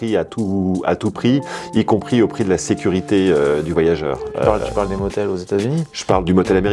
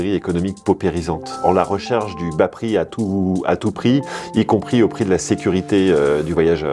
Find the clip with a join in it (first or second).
second